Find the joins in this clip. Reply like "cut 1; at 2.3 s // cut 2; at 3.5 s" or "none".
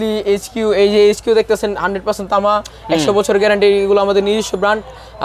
none